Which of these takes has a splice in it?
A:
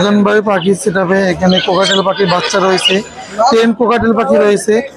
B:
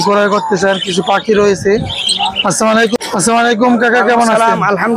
B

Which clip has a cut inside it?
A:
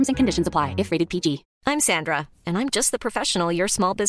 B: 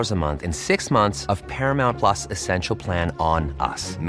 A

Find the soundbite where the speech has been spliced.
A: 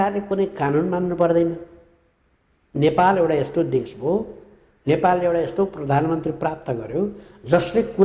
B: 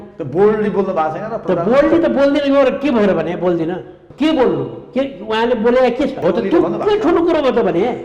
B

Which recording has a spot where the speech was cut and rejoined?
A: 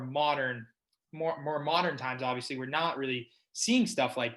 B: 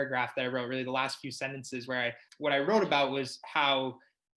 B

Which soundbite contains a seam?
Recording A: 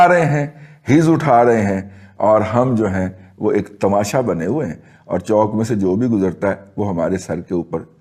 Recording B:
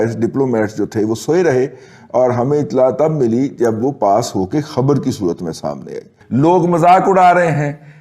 B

